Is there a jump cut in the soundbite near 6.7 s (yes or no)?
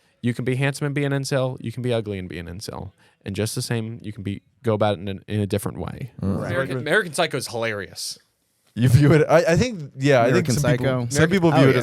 yes